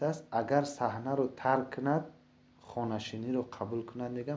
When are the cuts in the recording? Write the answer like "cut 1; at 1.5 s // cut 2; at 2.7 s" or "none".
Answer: none